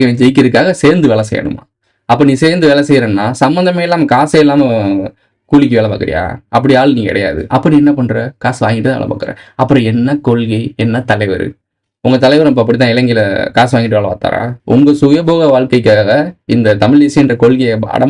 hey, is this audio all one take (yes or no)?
no